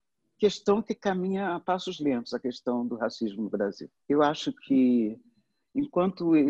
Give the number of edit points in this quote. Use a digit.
0